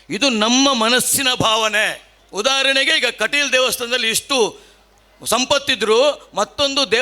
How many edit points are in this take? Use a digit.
1